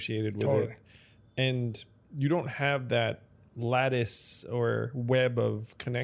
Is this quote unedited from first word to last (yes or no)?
yes